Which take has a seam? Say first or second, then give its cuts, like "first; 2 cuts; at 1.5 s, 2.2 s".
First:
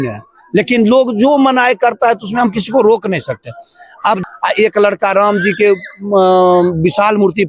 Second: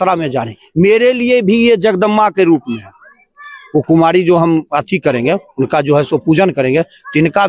first; 1 cut; at 4.2 s